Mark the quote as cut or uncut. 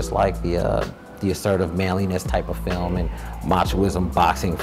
uncut